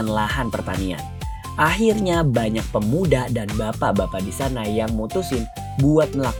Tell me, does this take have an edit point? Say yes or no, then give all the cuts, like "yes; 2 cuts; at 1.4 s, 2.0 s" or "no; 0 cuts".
no; 0 cuts